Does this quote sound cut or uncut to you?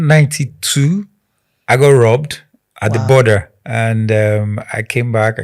cut